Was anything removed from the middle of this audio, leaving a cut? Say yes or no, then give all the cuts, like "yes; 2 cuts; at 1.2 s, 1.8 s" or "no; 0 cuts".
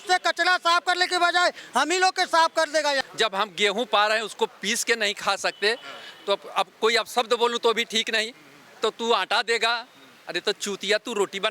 yes; 1 cut; at 3.0 s